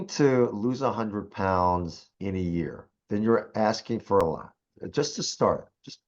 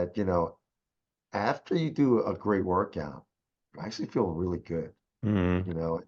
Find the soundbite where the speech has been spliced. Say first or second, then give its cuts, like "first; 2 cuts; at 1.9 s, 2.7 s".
first; 3 cuts; at 2.0 s, 2.9 s, 4.2 s